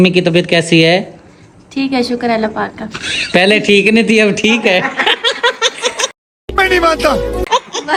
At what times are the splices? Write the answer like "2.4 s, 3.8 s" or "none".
none